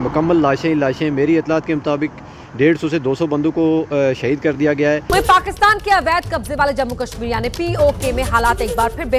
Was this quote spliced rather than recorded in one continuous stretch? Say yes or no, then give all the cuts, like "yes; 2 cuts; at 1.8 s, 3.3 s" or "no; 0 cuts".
yes; 1 cut; at 5.0 s